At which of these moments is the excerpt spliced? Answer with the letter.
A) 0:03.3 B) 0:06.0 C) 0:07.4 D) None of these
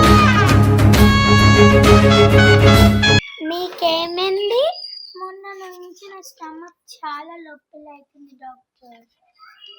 A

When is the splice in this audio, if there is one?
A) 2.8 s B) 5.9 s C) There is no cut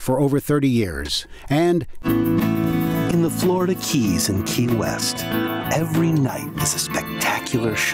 A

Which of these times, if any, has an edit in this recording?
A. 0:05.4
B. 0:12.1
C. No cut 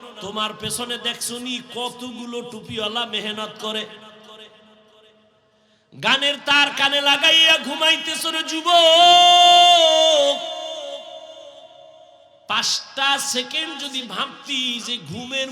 A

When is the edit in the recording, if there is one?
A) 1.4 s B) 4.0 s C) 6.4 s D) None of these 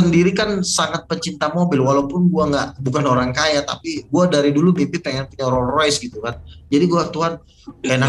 D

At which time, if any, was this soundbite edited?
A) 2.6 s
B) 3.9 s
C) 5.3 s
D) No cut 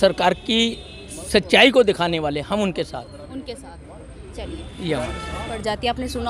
D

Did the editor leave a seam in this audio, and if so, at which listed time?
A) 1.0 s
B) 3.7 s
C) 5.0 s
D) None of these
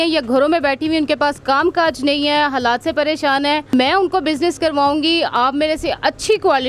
B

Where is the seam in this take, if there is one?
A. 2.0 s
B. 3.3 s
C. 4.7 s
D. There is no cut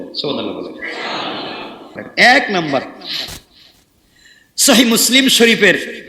A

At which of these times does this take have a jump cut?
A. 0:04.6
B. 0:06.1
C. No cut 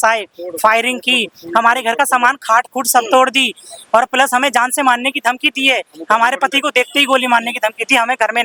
C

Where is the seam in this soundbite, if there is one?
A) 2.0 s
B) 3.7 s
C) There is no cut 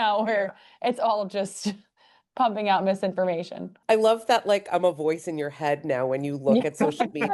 B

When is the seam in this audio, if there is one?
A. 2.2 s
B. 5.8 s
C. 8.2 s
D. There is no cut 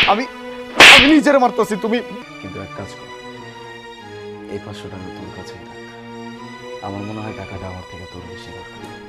A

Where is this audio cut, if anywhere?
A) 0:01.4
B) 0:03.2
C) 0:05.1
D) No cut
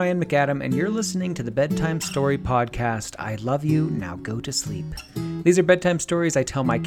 D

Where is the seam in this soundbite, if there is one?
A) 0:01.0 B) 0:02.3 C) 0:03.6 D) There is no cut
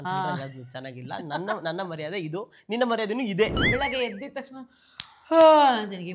C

